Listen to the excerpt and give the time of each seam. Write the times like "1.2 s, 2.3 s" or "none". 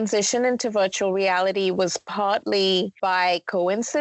2.9 s